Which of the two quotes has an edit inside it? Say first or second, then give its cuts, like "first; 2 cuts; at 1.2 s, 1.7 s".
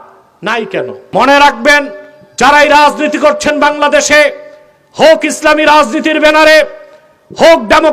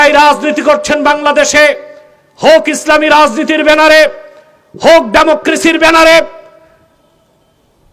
first; 1 cut; at 1.0 s